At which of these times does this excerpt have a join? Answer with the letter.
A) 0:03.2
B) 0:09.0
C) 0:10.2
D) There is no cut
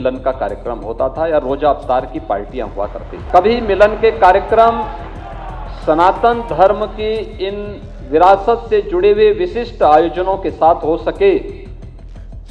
A